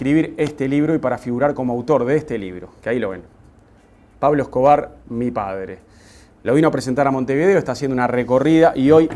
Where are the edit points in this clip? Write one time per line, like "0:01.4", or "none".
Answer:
none